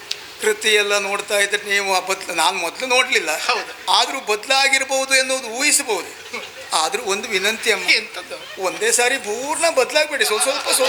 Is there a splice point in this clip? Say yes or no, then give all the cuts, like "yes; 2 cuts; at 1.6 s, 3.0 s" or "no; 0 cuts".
no; 0 cuts